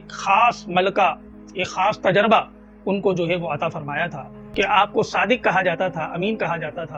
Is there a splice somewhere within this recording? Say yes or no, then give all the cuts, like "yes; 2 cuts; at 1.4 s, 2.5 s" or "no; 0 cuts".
yes; 1 cut; at 4.4 s